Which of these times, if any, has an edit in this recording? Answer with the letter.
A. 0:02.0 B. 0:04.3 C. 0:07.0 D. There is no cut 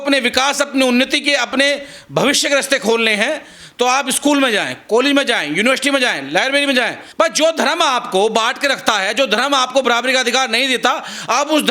C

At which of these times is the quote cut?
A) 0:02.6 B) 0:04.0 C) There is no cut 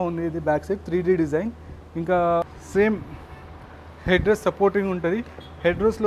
A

